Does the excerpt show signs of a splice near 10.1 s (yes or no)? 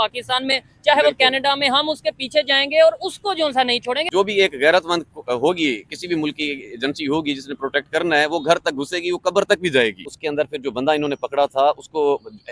yes